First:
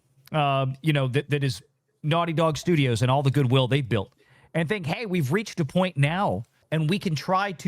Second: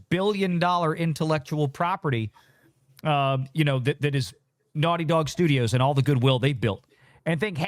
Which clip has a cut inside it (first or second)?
first